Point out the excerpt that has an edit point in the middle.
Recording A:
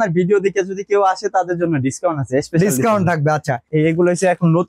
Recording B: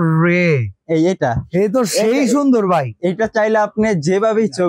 A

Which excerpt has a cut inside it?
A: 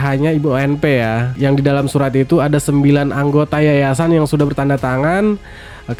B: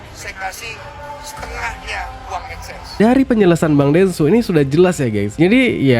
B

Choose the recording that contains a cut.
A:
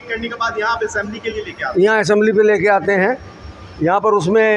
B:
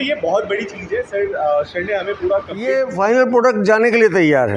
B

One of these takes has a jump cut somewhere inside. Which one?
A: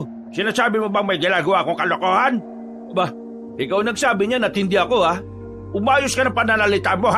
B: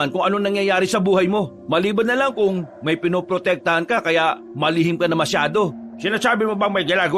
B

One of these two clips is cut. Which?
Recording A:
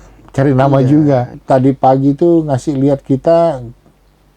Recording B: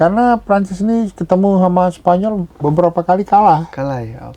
A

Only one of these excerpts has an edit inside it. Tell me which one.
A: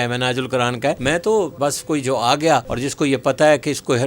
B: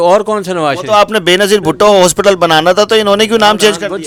A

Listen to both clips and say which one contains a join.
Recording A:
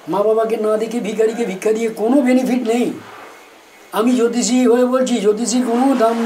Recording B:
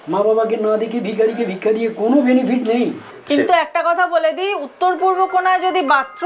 B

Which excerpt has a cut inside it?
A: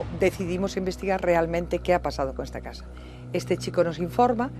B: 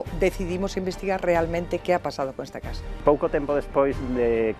B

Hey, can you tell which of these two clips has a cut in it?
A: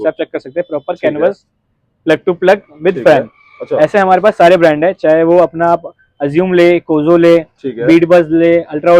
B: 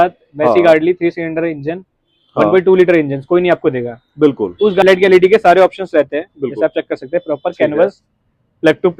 B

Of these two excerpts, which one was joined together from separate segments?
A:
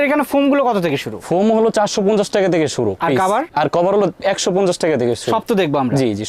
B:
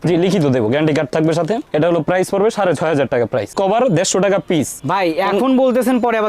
B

